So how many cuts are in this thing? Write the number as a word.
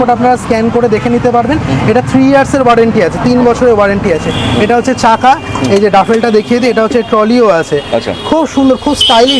zero